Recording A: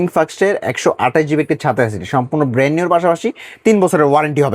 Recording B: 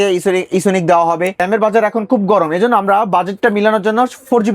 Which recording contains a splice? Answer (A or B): B